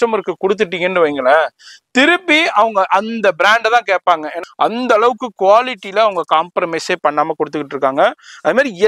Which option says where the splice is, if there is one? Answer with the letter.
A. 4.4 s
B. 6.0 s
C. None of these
A